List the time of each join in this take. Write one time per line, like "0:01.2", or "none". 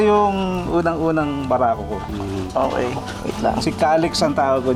none